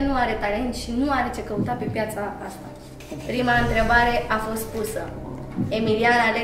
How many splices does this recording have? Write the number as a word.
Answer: zero